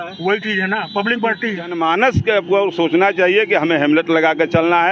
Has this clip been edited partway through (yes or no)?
yes